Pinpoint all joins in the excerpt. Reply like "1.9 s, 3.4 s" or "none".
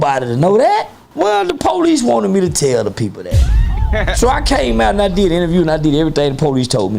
1.0 s